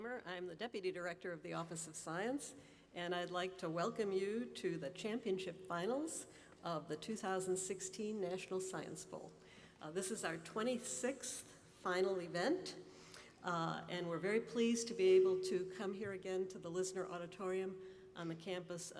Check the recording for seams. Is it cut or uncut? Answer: uncut